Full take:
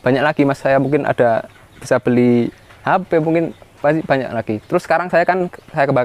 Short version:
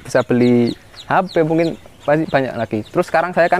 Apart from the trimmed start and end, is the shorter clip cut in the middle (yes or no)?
no